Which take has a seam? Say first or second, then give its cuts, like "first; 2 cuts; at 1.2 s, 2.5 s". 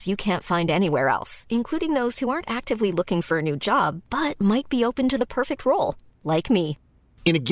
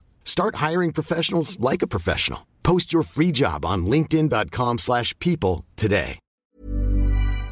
second; 1 cut; at 6.5 s